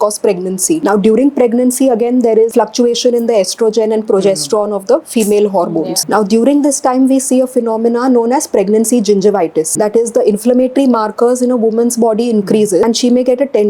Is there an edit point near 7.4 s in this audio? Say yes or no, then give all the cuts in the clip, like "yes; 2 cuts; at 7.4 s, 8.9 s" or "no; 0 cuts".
no; 5 cuts; at 0.8 s, 2.5 s, 6.0 s, 9.7 s, 12.9 s